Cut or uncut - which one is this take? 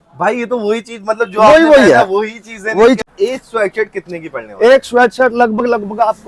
cut